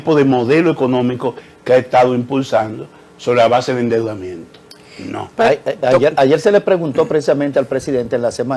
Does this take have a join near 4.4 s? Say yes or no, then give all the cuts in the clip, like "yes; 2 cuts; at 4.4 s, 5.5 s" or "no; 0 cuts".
no; 0 cuts